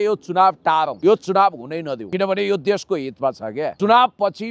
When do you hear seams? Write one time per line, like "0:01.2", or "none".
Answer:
0:00.9
0:02.0
0:03.7